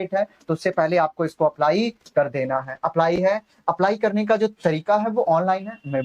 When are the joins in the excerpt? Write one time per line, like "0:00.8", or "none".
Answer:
none